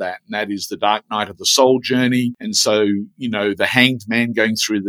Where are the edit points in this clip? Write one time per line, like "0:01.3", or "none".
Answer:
0:02.5